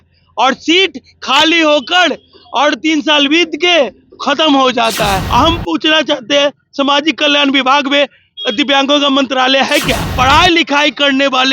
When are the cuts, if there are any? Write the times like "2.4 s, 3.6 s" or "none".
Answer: 5.2 s, 10.1 s